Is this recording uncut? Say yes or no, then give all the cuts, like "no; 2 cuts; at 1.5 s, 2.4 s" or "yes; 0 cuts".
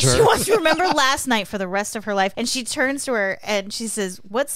no; 1 cut; at 2.3 s